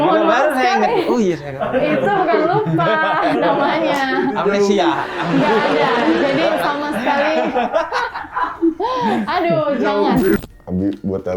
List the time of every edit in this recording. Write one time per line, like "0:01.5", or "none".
0:10.4